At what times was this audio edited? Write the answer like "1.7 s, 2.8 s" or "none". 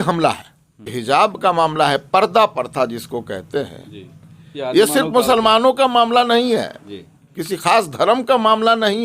1.0 s